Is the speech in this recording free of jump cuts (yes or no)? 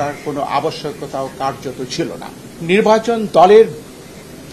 no